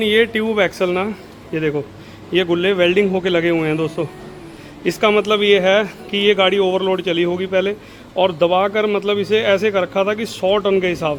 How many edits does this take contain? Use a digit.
0